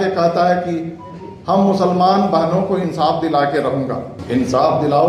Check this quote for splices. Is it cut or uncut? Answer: cut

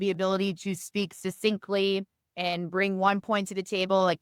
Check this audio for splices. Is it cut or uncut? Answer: uncut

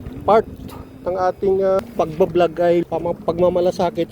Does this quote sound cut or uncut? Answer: cut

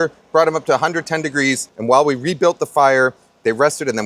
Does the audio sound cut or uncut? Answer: cut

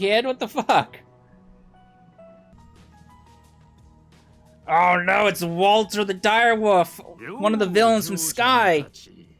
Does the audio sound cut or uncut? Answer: cut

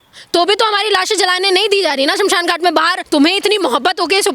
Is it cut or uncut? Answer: cut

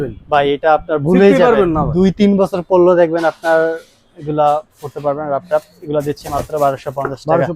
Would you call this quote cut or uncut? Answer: uncut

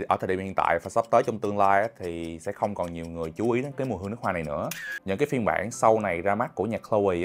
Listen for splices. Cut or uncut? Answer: cut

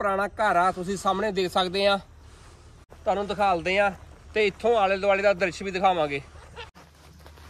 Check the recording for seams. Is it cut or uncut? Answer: uncut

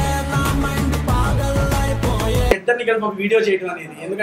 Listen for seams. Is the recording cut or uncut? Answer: cut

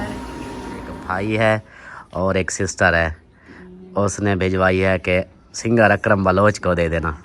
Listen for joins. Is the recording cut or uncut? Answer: cut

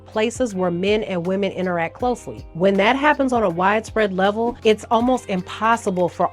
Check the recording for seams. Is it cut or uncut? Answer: uncut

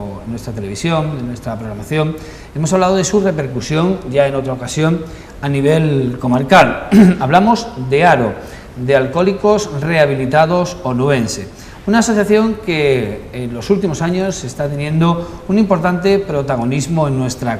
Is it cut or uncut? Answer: uncut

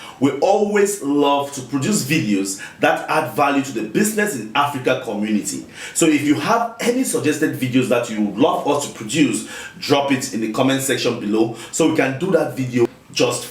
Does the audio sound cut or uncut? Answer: uncut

